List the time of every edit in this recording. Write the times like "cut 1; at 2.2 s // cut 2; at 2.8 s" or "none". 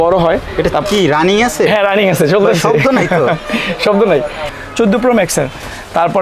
cut 1; at 4.5 s